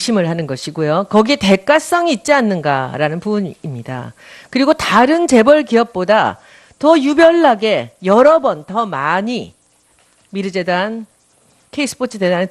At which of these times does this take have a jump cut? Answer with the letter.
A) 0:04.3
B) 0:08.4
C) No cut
B